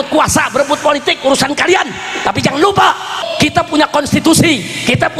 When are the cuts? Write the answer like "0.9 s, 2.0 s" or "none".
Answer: 3.2 s